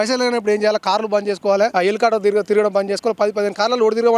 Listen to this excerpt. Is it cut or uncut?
uncut